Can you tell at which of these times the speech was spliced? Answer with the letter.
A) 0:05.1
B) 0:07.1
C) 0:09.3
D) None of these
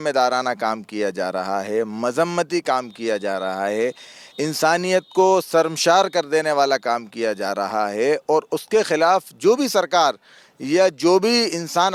D